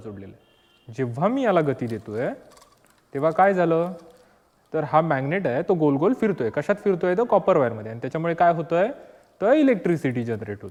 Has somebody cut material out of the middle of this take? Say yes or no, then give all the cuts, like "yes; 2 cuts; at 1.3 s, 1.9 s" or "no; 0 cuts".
no; 0 cuts